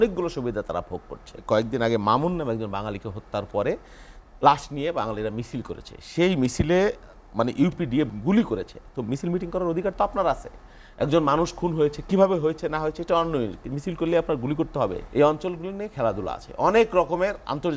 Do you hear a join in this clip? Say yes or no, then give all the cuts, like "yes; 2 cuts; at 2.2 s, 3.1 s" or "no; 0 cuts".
yes; 3 cuts; at 1.4 s, 8.1 s, 15.0 s